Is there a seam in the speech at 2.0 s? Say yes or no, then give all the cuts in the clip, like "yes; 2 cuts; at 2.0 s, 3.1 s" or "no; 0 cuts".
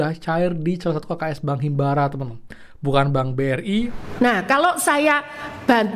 no; 1 cut; at 4.0 s